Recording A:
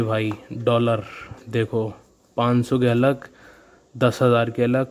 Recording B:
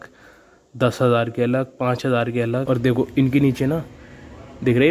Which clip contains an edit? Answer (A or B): B